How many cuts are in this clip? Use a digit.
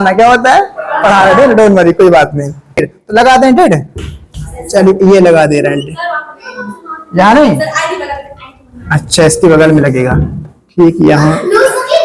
1